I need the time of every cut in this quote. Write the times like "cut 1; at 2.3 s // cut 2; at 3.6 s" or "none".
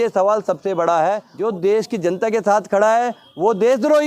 cut 1; at 1.3 s